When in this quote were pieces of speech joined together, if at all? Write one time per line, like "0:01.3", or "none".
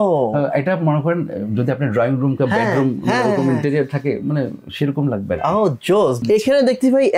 0:06.2